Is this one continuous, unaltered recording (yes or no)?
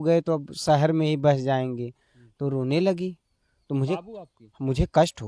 yes